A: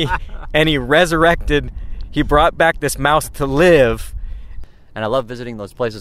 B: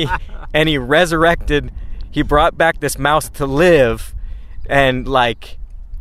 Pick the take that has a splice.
A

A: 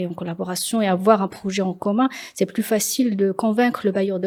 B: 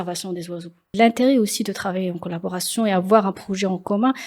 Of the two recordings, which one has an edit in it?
B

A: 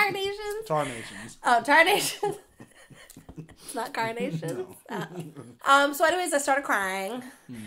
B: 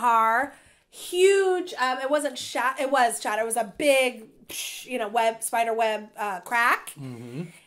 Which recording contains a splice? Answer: A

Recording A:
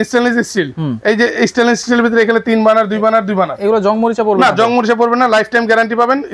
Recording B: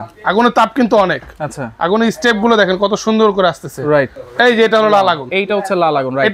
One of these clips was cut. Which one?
B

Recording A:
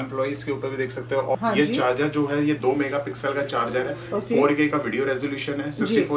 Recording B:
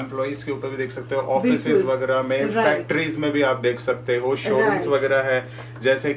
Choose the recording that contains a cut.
A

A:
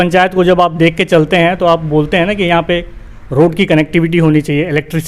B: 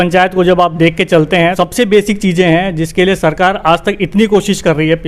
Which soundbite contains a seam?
B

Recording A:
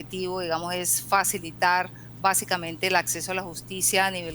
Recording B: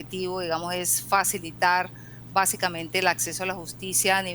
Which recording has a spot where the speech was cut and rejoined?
A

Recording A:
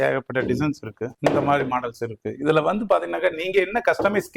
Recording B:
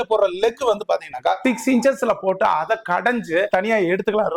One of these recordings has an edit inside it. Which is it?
B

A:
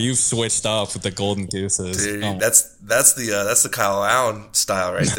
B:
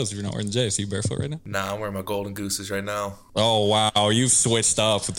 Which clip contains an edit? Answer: B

